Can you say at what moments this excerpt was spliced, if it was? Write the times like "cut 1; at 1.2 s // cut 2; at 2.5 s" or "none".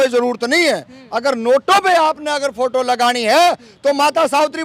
none